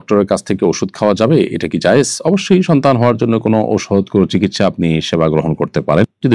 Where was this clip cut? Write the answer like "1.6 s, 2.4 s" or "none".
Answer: none